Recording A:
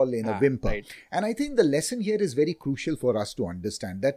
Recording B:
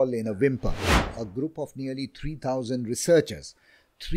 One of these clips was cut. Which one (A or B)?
B